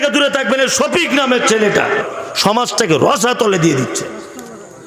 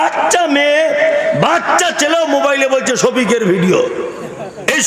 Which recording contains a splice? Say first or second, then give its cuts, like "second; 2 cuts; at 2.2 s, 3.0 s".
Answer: first; 1 cut; at 2.1 s